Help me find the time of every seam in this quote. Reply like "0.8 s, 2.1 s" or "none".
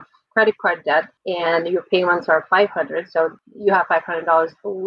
1.2 s, 3.3 s

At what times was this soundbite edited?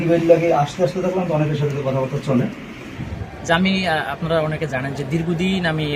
2.9 s

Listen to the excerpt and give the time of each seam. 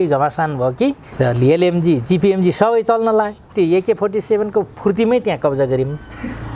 1.0 s, 3.5 s

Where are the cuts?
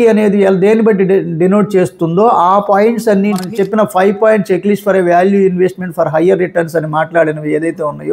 3.4 s

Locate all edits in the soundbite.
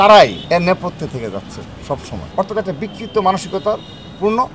none

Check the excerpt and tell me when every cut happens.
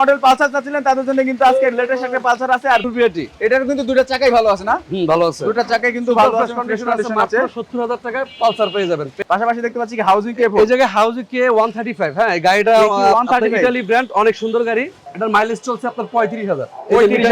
2.8 s, 9.2 s, 15.0 s

